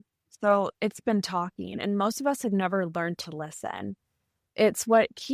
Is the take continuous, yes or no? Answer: no